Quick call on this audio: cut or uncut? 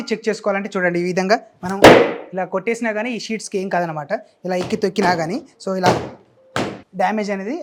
uncut